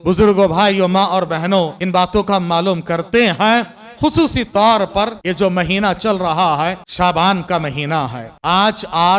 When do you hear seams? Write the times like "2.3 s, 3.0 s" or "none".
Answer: 1.8 s, 5.2 s, 6.8 s, 8.3 s